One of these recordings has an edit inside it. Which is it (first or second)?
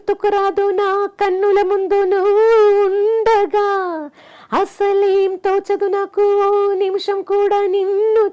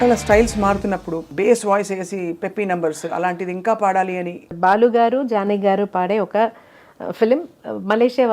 second